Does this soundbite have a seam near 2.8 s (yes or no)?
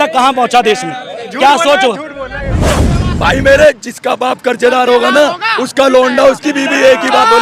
yes